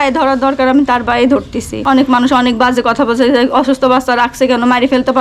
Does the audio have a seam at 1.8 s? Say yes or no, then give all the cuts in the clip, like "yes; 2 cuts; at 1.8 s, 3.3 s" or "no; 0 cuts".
yes; 1 cut; at 1.8 s